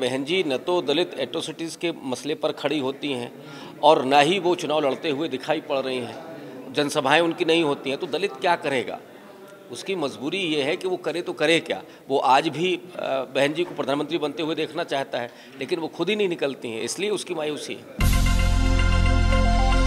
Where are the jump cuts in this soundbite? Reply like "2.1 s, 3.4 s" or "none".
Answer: 17.9 s